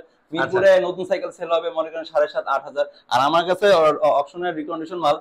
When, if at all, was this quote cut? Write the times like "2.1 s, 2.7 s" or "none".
none